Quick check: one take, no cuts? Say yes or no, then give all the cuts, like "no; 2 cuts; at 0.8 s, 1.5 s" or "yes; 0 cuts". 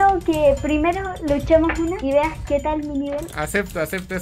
no; 2 cuts; at 2.0 s, 3.3 s